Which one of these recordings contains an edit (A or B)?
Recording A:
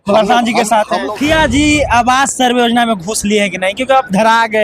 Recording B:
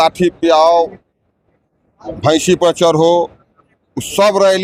A